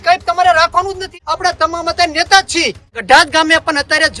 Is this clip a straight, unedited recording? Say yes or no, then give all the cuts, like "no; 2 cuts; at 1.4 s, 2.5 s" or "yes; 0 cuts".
no; 2 cuts; at 1.1 s, 3.0 s